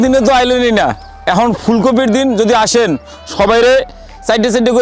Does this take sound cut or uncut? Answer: uncut